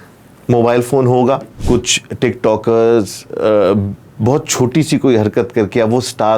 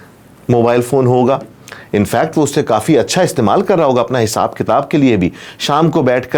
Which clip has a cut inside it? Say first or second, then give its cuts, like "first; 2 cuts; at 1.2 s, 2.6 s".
first; 1 cut; at 1.5 s